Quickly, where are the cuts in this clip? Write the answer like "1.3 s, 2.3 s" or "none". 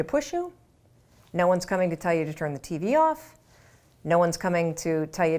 none

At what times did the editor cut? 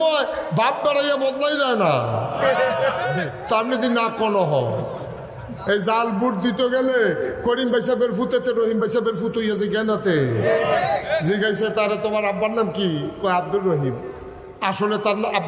none

